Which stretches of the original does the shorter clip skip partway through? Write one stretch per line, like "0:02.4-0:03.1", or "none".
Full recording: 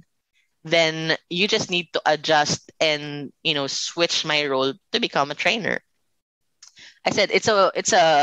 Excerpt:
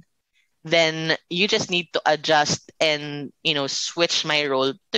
none